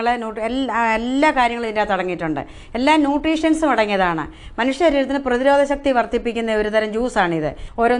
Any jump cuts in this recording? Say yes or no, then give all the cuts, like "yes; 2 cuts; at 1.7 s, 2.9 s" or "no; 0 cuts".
no; 0 cuts